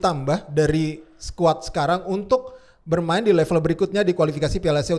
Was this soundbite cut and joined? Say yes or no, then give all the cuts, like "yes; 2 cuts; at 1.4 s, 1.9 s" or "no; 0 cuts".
no; 0 cuts